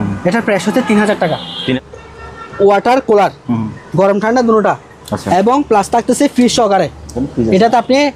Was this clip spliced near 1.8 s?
yes; 1 cut; at 1.8 s

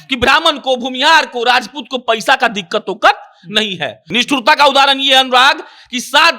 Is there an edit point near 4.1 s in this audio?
yes; 1 cut; at 4.1 s

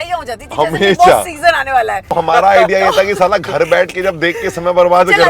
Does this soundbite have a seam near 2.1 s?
yes; 1 cut; at 2.1 s

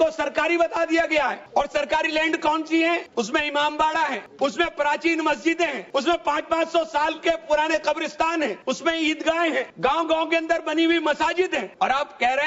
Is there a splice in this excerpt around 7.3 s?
no; 7 cuts; at 1.4 s, 3.1 s, 4.2 s, 5.8 s, 8.6 s, 9.7 s, 11.7 s

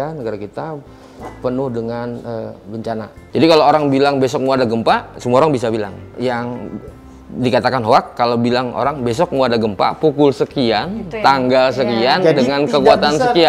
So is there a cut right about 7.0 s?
no; 1 cut; at 3.1 s

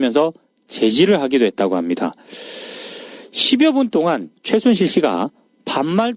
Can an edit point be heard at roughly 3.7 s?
yes; 1 cut; at 3.7 s

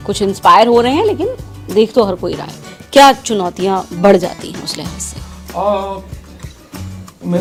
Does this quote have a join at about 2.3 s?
no; 0 cuts

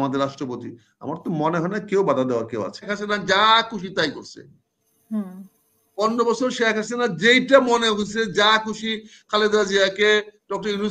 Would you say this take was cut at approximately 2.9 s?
yes; 1 cut; at 2.9 s

